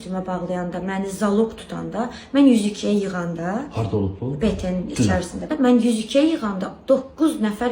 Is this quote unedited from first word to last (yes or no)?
no